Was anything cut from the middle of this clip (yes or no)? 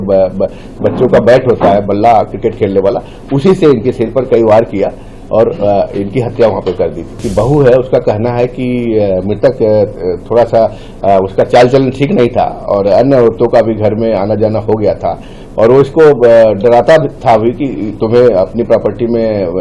yes